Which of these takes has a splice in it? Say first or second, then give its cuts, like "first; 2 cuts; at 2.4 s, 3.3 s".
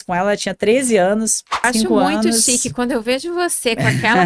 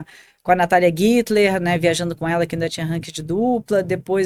first; 1 cut; at 1.6 s